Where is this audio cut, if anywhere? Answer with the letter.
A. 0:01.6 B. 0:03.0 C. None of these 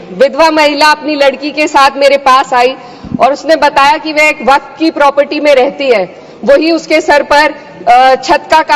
C